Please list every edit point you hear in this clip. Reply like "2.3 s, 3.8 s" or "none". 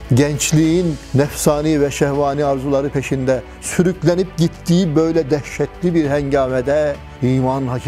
1.0 s

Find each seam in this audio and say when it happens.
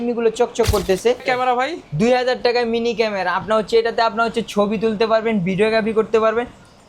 1.2 s

